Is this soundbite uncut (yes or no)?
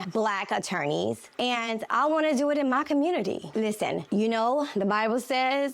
no